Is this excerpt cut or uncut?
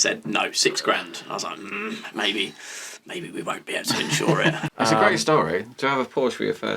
cut